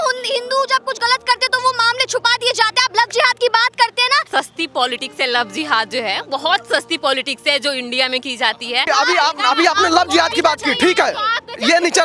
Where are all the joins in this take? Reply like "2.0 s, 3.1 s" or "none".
4.3 s, 8.9 s